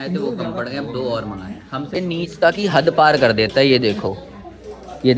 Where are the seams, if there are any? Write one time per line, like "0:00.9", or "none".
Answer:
0:01.9

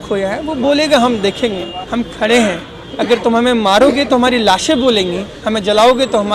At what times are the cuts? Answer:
0:01.8

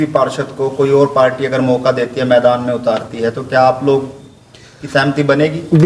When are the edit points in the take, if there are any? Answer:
none

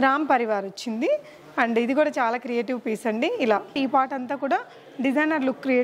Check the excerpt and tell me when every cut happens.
0:03.8

